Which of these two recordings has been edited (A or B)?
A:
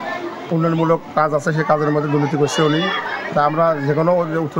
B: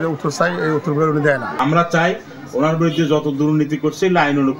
B